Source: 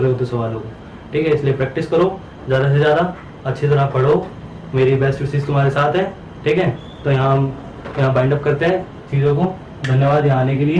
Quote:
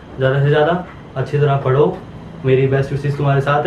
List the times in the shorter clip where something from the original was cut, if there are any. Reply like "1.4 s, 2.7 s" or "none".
none